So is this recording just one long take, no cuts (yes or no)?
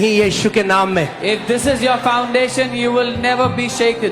yes